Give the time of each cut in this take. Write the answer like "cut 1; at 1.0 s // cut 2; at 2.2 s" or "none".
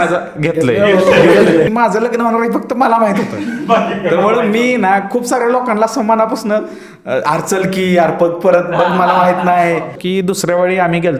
cut 1; at 1.7 s // cut 2; at 10.0 s